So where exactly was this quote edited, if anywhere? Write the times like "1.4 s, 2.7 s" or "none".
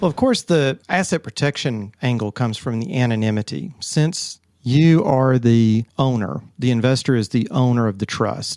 0.8 s, 1.9 s, 5.9 s